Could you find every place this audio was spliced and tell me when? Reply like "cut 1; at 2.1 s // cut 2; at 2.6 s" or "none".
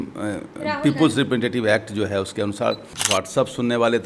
cut 1; at 2.9 s